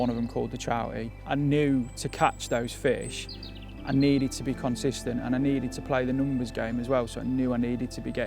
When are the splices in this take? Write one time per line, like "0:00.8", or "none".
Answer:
none